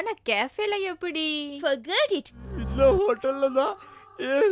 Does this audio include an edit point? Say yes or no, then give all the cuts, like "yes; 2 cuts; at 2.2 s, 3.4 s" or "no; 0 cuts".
yes; 1 cut; at 2.5 s